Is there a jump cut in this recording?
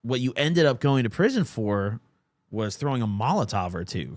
no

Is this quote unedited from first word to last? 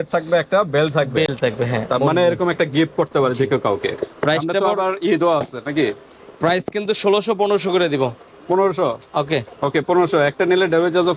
yes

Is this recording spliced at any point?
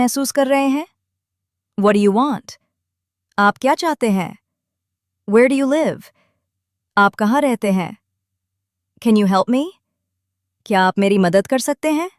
no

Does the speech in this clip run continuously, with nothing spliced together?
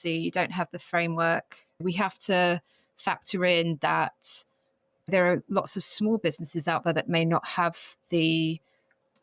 no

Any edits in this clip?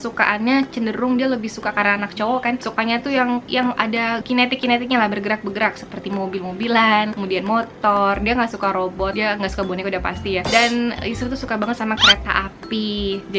no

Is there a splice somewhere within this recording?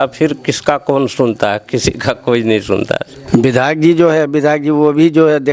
yes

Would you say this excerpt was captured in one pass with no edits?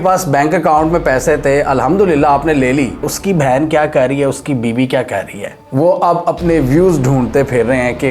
no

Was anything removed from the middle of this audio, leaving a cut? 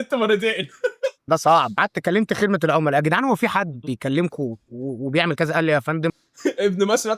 no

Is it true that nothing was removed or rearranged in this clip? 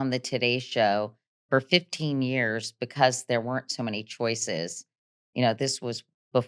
yes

